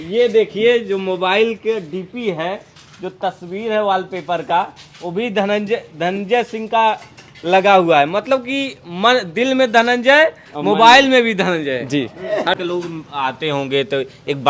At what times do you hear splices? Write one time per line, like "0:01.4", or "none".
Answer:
0:12.6